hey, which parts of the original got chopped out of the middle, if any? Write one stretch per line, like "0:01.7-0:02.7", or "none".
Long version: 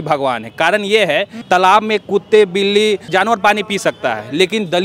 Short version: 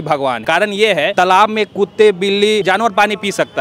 0:00.8-0:01.2
0:03.0-0:03.1